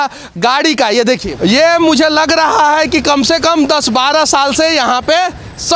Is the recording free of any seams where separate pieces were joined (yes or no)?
no